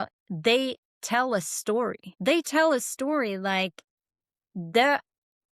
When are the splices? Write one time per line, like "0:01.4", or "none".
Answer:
0:02.1